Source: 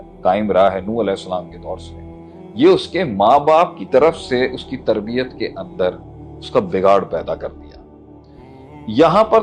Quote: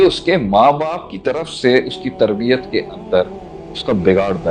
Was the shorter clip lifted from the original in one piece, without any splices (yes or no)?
yes